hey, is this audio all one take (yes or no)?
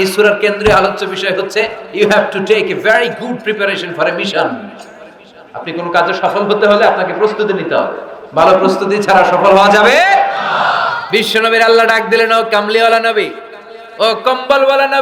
no